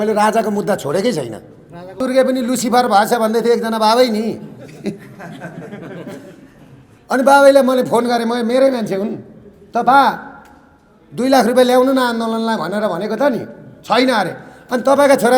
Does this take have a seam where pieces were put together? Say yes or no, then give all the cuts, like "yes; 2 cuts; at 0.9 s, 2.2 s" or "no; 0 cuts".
yes; 1 cut; at 2.0 s